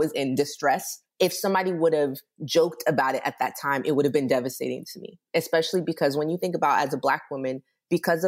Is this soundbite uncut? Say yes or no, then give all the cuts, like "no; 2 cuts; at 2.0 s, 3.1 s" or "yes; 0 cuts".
no; 1 cut; at 1.0 s